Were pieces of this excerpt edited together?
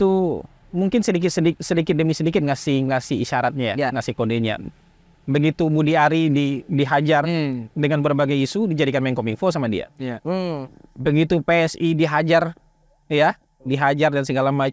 no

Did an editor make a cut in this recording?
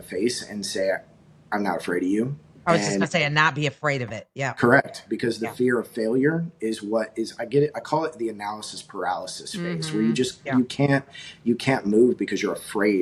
no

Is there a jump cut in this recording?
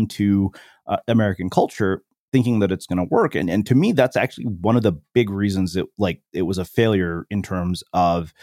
no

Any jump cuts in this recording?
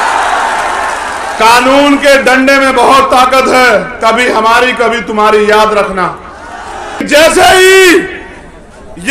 yes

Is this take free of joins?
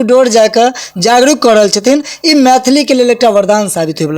yes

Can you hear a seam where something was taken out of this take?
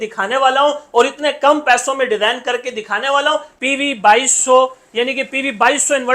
yes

